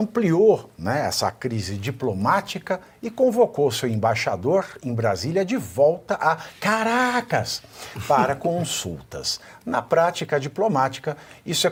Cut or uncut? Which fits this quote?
uncut